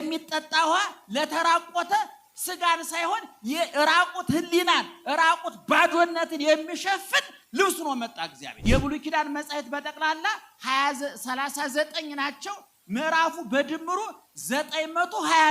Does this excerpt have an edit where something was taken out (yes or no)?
yes